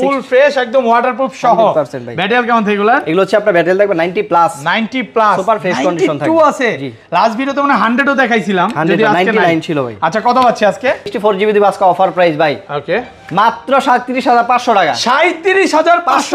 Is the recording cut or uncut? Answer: cut